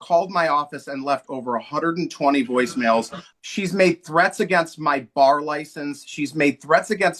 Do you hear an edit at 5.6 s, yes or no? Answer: no